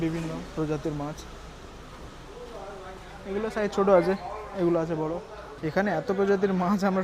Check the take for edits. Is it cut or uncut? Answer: cut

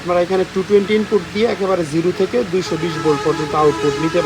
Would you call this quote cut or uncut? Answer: uncut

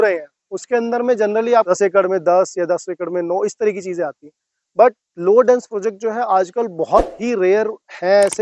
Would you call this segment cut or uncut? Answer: cut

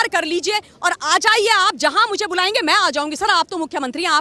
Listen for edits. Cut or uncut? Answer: uncut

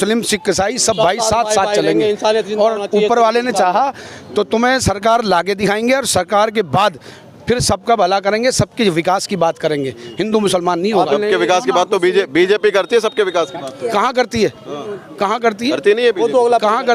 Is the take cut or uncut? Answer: uncut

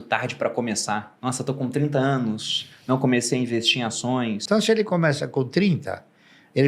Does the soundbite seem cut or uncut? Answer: cut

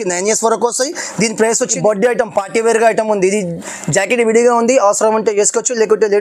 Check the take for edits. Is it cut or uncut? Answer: cut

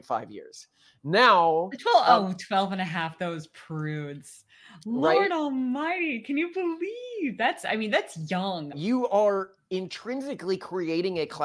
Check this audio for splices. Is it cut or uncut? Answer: cut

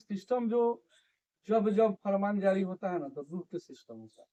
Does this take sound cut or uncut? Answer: uncut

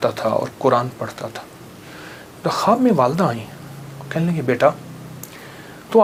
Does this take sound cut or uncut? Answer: uncut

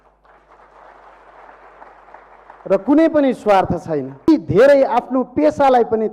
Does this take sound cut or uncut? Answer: cut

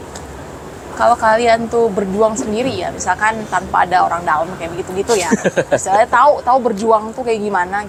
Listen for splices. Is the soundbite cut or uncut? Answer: uncut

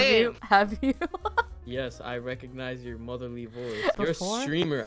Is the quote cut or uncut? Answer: cut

